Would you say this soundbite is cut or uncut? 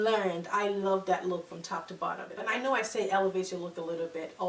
cut